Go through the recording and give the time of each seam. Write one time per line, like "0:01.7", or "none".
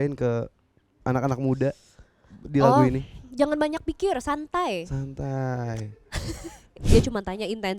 0:06.8